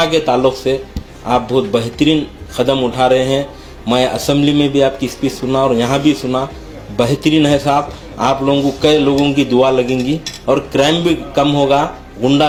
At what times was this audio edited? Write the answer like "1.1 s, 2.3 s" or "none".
none